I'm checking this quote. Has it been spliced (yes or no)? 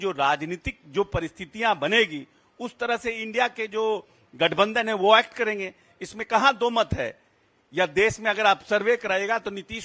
no